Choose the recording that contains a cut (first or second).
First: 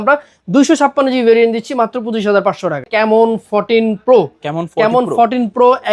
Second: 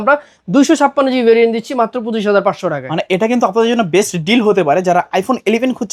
first